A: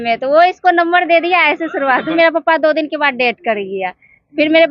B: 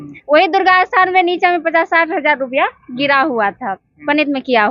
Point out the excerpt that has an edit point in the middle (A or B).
A